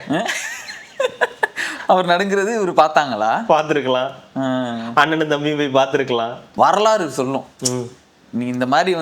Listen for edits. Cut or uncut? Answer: cut